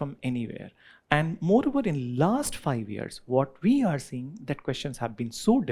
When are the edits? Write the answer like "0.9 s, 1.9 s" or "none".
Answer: none

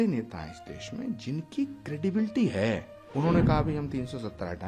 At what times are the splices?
3.0 s

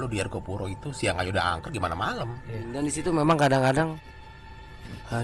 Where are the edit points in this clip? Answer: 2.7 s

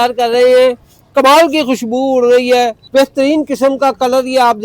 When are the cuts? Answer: 2.8 s

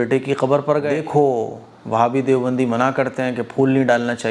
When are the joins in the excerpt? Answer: 1.0 s

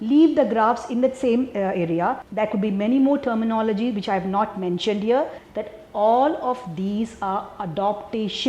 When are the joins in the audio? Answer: 2.2 s, 5.4 s

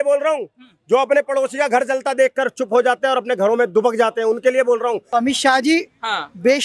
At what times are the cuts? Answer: 5.0 s

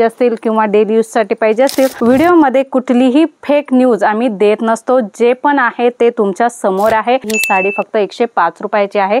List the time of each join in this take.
2.0 s, 7.3 s

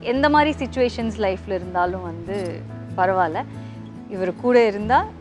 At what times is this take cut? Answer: none

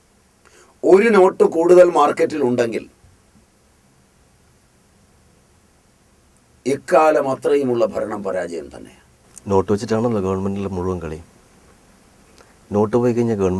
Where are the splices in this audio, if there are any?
none

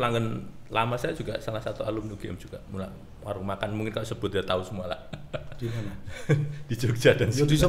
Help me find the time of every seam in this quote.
none

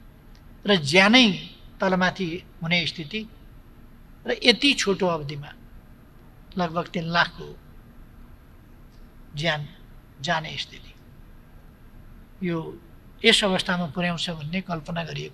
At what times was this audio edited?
none

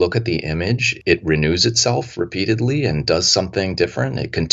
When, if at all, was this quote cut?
0.9 s

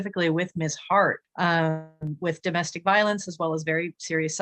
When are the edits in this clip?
1.2 s

